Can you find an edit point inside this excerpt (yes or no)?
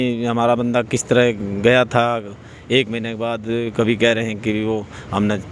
no